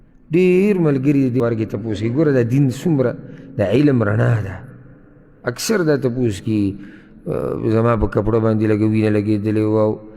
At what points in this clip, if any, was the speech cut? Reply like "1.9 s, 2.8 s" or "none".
1.4 s